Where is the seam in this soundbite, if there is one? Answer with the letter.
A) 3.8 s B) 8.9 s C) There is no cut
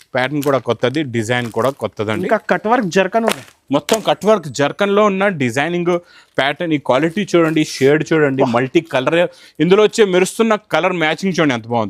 C